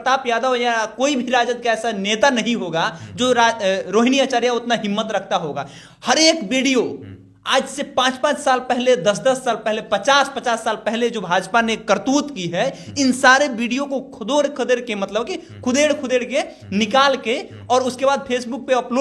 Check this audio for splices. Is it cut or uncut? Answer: uncut